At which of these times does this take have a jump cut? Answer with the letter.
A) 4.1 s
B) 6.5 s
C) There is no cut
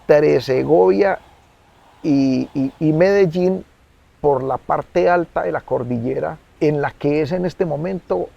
B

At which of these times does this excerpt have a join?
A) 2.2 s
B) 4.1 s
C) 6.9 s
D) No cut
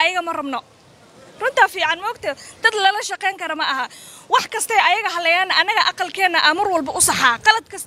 D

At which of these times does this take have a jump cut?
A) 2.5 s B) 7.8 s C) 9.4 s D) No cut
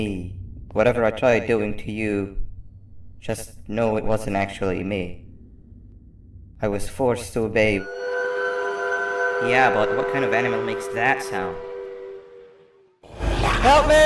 B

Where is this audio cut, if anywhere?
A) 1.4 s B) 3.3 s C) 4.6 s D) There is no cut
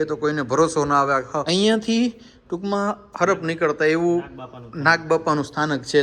A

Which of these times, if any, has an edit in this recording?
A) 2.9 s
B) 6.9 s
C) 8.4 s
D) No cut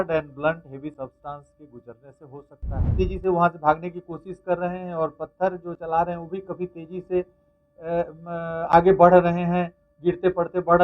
A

